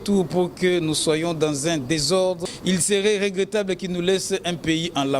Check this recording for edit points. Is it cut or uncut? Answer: cut